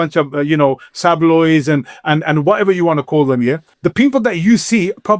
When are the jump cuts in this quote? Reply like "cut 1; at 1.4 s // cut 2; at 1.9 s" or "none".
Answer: cut 1; at 3.7 s